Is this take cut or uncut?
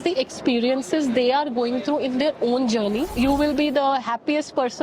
cut